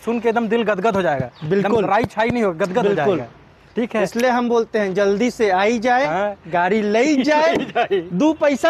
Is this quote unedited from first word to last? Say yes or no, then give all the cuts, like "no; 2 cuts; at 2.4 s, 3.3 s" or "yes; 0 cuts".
yes; 0 cuts